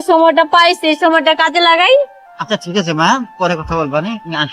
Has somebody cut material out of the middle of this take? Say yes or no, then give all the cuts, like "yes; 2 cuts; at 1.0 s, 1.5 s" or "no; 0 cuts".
no; 0 cuts